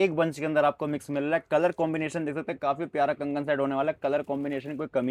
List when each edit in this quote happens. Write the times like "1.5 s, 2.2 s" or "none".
none